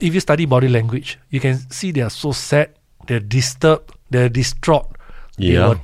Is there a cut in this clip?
no; 0 cuts

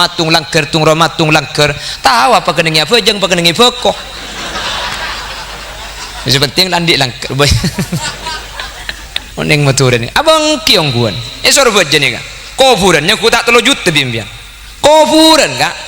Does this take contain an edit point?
yes; 1 cut; at 9.3 s

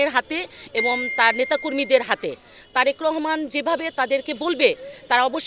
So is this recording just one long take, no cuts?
yes; 0 cuts

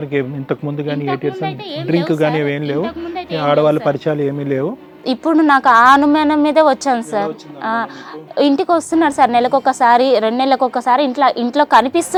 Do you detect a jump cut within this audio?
no; 0 cuts

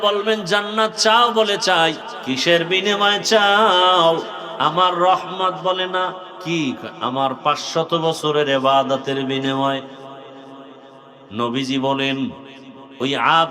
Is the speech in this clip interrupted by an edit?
yes; 3 cuts; at 2.1 s, 4.4 s, 6.3 s

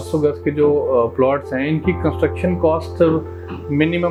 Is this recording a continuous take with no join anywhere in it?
yes; 0 cuts

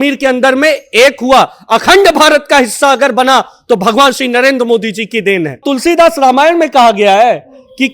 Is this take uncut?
no; 1 cut; at 5.6 s

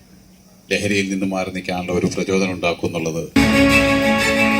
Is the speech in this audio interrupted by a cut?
yes; 1 cut; at 3.4 s

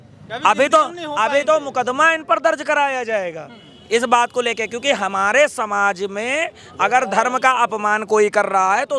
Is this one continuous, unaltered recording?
yes; 0 cuts

